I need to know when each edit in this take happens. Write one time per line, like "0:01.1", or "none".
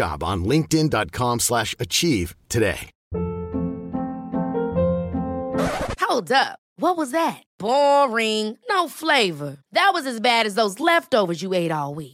0:02.9